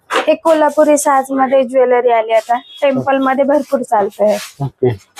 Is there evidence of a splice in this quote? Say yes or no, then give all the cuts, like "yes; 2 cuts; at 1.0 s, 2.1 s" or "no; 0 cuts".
no; 0 cuts